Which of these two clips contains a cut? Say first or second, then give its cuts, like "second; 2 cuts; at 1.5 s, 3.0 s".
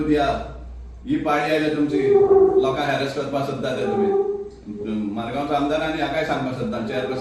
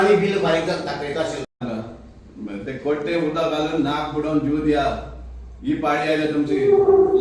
second; 1 cut; at 1.6 s